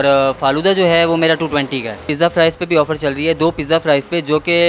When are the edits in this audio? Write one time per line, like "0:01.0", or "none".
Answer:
0:02.0